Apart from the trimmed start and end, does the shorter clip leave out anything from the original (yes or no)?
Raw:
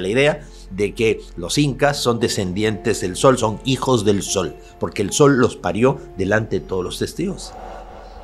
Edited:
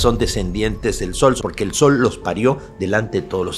yes